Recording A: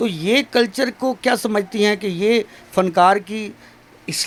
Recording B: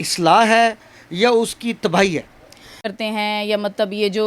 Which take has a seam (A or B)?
B